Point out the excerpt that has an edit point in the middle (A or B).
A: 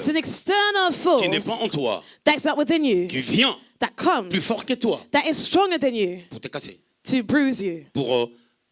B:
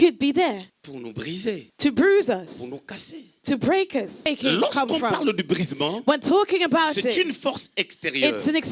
B